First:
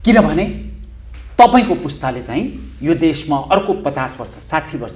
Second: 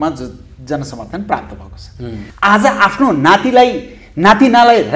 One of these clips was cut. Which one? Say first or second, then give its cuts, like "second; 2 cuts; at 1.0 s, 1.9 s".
second; 1 cut; at 2.2 s